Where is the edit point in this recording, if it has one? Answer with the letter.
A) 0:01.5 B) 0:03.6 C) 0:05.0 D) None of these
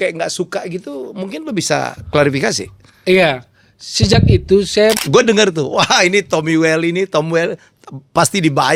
C